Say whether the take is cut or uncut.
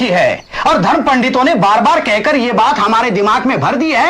uncut